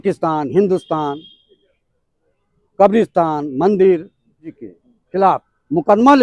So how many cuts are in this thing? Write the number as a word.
one